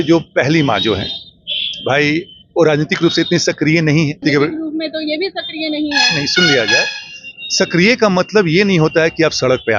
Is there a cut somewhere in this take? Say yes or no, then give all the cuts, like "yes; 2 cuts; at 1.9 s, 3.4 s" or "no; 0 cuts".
yes; 1 cut; at 4.2 s